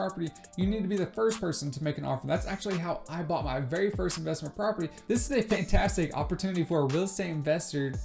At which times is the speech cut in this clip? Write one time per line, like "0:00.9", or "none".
0:04.9

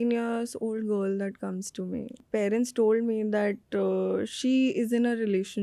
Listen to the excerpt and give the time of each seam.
0:02.2

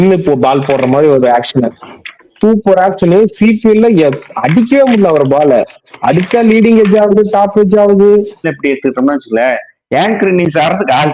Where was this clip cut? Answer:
0:08.5

